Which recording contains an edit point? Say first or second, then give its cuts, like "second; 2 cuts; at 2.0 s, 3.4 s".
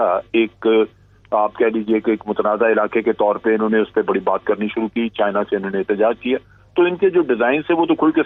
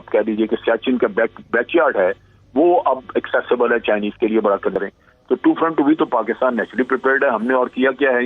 second; 1 cut; at 4.8 s